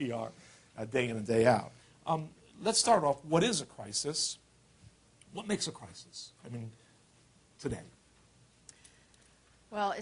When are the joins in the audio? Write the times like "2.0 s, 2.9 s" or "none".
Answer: 3.5 s